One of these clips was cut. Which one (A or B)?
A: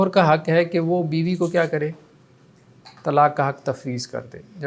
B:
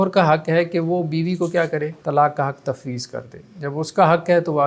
B